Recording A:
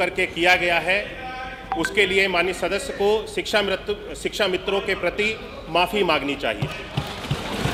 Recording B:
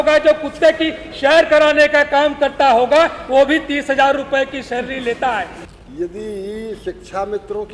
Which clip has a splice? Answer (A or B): B